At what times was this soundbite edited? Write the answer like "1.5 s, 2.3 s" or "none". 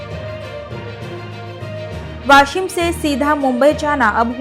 0.9 s